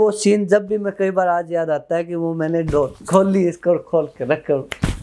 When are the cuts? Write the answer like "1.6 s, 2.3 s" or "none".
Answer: none